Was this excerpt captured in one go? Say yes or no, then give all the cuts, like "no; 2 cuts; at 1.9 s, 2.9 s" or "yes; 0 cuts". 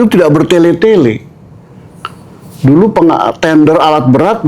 yes; 0 cuts